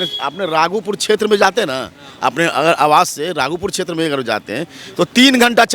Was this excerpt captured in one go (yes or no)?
yes